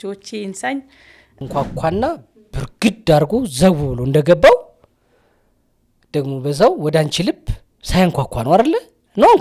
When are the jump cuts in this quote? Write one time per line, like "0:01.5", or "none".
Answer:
0:01.4